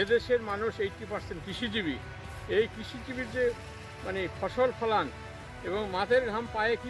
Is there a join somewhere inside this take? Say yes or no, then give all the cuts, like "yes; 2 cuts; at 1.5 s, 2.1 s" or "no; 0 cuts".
no; 0 cuts